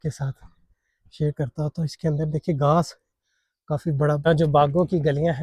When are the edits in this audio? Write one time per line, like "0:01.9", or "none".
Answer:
0:04.3